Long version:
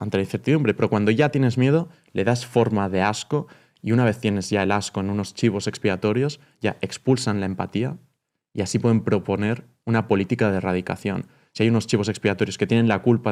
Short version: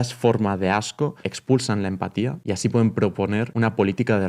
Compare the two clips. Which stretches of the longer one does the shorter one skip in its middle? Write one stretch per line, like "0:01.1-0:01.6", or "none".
0:03.6-0:06.9
0:08.0-0:08.5
0:09.6-0:09.8